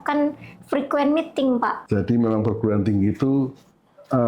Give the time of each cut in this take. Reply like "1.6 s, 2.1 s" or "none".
1.8 s

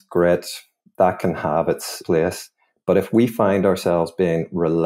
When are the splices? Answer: 2.0 s

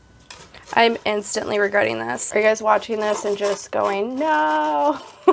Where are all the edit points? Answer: 2.2 s

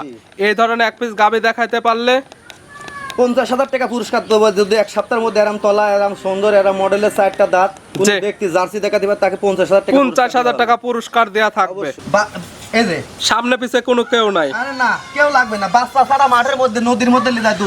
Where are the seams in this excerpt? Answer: 11.9 s

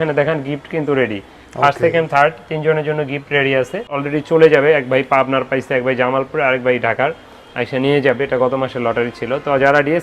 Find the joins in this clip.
none

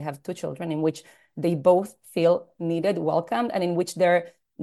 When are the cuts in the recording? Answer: none

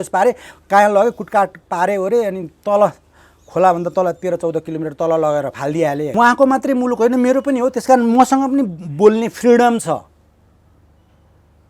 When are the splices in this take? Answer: 6.1 s

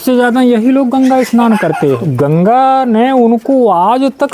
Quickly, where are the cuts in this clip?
2.1 s

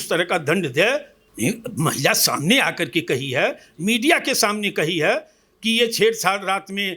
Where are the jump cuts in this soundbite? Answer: 1.2 s

